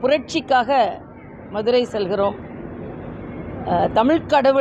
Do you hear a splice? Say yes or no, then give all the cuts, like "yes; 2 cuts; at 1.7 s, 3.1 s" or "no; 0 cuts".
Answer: no; 0 cuts